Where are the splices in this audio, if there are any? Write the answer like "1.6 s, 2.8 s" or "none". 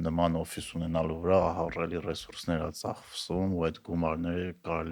none